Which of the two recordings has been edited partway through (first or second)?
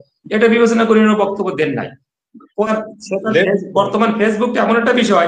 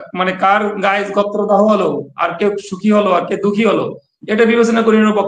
first